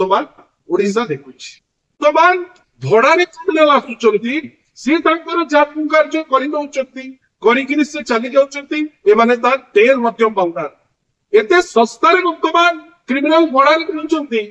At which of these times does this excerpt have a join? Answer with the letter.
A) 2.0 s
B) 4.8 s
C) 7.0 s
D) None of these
A